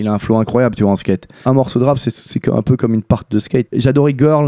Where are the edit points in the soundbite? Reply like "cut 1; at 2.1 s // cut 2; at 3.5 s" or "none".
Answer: cut 1; at 1.4 s // cut 2; at 3.7 s